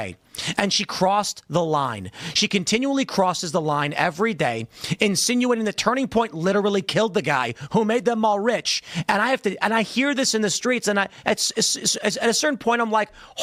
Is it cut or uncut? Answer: uncut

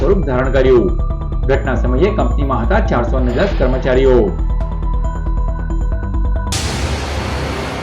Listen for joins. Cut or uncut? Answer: cut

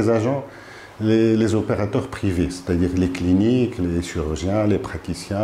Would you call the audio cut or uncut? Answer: uncut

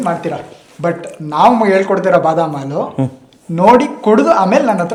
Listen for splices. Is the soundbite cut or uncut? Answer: uncut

